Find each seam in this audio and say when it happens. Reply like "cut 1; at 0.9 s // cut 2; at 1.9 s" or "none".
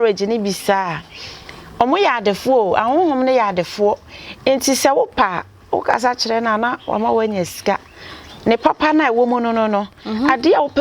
none